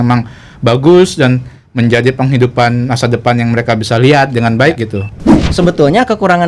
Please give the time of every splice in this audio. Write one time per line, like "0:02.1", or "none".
0:05.4